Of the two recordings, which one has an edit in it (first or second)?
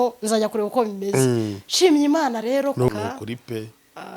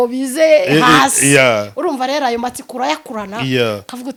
first